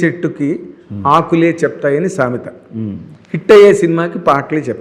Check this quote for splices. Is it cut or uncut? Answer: uncut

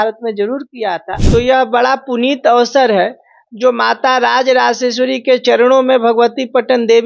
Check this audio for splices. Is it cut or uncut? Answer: cut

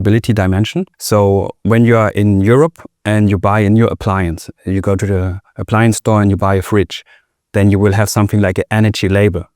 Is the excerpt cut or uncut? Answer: cut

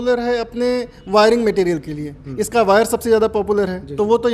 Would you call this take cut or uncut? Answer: uncut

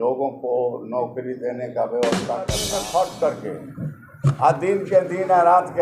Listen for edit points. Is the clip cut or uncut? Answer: cut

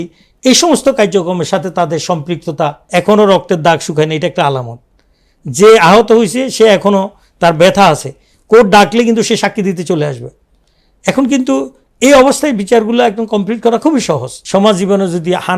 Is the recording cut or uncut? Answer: cut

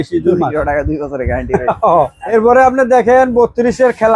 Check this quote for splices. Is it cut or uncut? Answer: cut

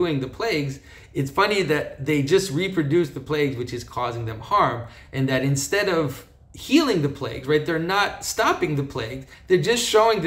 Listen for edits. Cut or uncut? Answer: uncut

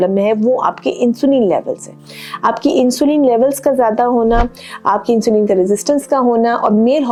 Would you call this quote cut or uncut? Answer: uncut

